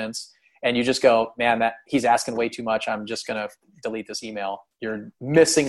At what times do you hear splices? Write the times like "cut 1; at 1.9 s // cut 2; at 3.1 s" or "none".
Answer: cut 1; at 4.7 s